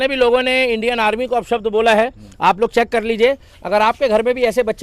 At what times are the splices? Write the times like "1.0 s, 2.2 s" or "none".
none

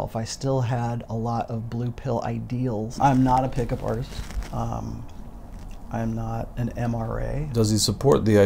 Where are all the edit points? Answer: 3.0 s, 7.5 s

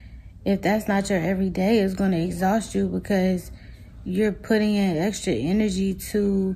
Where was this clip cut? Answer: none

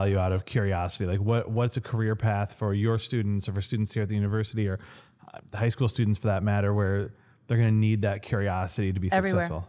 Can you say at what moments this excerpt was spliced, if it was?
none

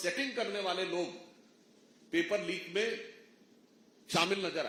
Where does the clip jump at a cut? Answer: none

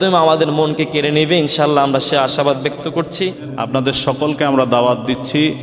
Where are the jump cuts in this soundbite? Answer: 3.5 s

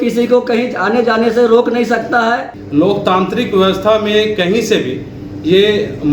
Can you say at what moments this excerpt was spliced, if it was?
2.6 s

